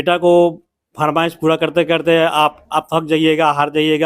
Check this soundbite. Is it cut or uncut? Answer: uncut